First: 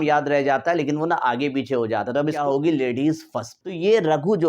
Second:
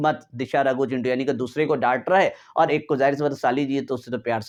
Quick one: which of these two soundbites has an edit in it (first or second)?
first